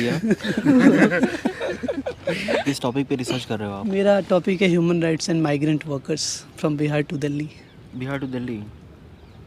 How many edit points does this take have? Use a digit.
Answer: 1